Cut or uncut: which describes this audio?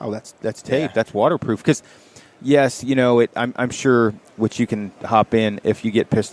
uncut